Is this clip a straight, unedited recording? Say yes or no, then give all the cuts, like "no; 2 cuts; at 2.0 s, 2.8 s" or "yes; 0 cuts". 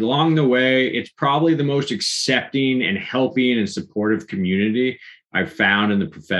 yes; 0 cuts